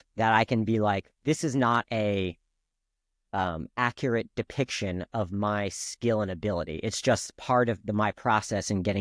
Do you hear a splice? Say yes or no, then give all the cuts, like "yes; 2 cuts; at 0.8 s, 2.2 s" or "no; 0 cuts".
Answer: no; 0 cuts